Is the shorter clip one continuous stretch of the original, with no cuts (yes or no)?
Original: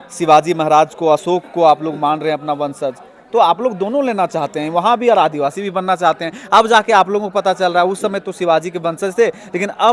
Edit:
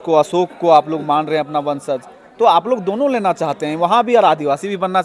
yes